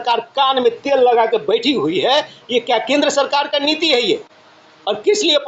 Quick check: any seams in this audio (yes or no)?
no